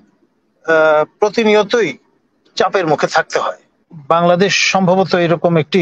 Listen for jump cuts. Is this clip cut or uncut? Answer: cut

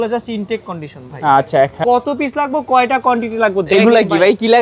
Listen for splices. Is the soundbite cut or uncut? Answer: cut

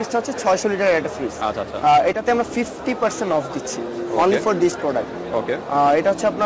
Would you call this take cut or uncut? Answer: uncut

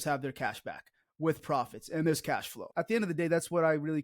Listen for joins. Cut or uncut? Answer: cut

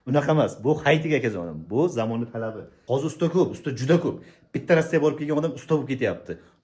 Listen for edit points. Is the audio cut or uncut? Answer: cut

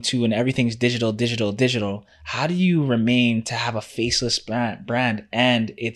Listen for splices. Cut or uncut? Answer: uncut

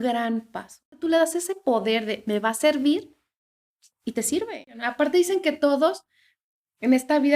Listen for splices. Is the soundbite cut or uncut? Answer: cut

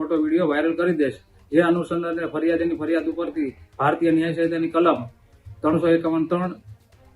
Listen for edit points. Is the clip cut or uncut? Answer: uncut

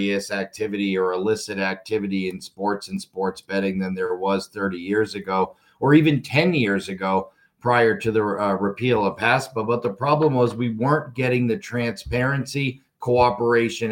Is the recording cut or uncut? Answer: uncut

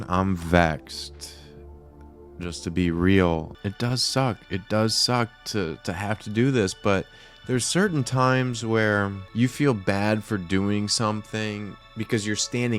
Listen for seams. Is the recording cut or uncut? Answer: cut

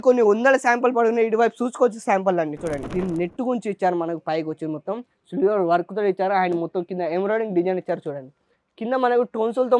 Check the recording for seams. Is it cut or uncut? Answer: cut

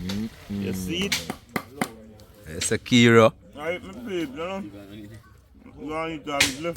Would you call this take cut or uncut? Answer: cut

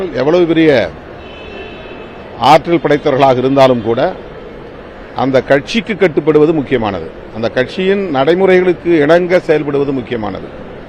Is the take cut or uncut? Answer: uncut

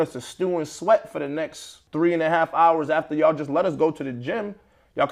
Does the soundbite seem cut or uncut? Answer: uncut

